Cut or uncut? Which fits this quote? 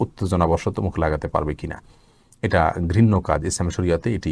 uncut